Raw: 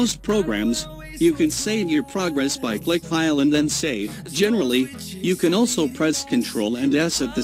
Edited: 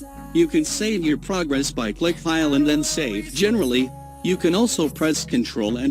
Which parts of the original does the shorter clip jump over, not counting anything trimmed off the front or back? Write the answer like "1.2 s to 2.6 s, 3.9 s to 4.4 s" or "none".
4.1 s to 4.2 s